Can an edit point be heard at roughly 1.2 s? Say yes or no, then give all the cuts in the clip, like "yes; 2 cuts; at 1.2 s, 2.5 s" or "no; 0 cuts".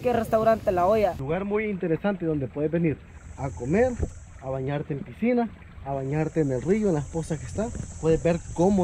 yes; 1 cut; at 1.2 s